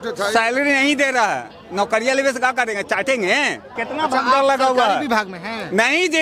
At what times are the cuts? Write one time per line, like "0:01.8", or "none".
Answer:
0:03.7